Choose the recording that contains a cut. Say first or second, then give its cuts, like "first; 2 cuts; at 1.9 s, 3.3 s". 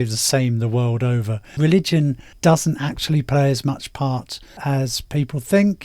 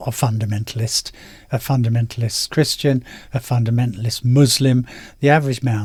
first; 1 cut; at 2.3 s